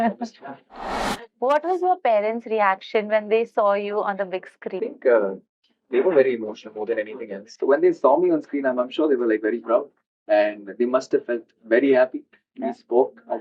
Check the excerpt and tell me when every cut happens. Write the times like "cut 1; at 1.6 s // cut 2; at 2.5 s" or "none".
cut 1; at 1.0 s // cut 2; at 7.5 s

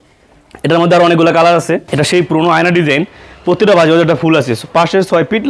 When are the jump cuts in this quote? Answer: cut 1; at 1.9 s

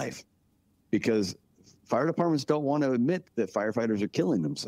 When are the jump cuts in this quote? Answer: cut 1; at 3.2 s

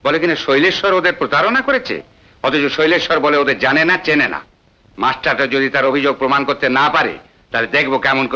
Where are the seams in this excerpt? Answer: none

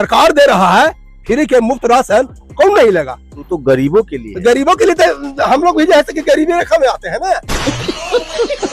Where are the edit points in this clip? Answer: cut 1; at 7.5 s

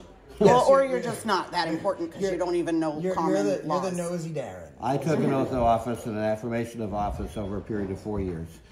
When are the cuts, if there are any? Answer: none

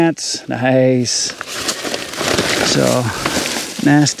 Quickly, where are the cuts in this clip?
none

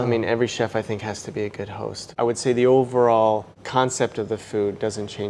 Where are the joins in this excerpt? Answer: cut 1; at 2.1 s

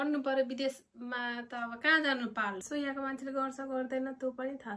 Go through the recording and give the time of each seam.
cut 1; at 2.6 s

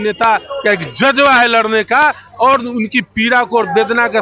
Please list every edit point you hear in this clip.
none

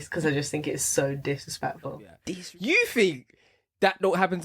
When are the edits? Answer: cut 1; at 2.1 s

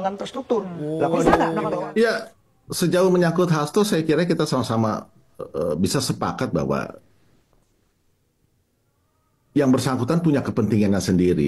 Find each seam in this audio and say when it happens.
cut 1; at 1.8 s

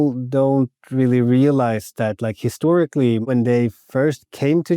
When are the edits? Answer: cut 1; at 3.2 s

